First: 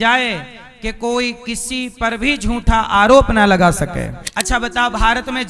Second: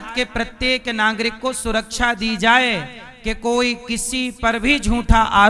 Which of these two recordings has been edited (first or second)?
first